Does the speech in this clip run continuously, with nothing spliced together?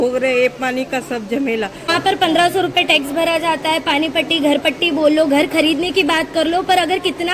no; 1 cut; at 1.9 s

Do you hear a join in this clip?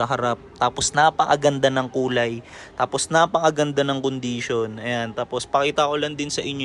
no; 0 cuts

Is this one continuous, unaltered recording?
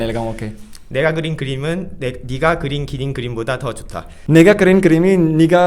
no; 1 cut; at 4.1 s

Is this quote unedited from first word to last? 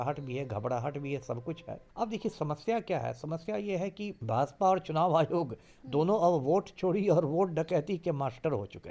no; 2 cuts; at 1.8 s, 4.2 s

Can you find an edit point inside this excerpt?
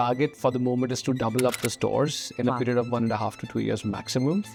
no; 0 cuts

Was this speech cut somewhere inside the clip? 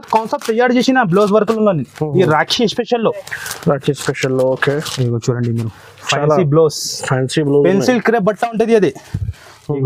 no; 0 cuts

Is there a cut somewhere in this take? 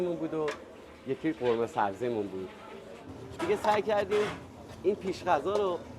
yes; 1 cut; at 3.1 s

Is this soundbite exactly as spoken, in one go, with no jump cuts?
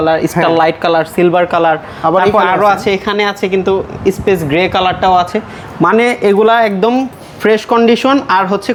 yes; 0 cuts

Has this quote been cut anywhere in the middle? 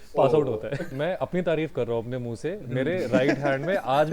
yes; 1 cut; at 0.9 s

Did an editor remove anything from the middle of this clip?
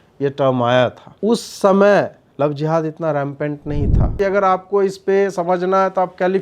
yes; 3 cuts; at 1.0 s, 2.2 s, 4.1 s

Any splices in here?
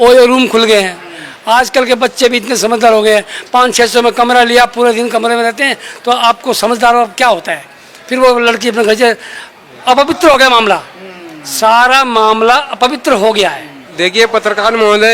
no; 0 cuts

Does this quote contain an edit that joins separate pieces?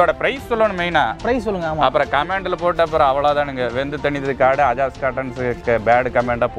no; 0 cuts

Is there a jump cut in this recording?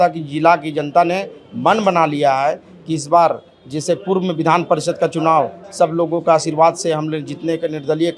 no; 0 cuts

